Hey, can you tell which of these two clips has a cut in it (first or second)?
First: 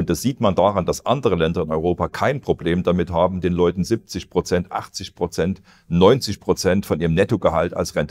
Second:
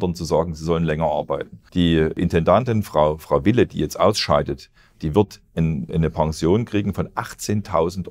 second